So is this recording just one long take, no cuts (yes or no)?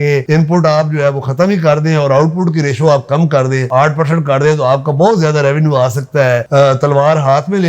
yes